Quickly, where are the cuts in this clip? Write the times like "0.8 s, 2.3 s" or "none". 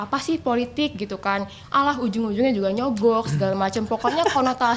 none